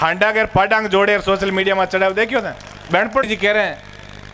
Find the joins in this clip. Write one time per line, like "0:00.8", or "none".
0:03.3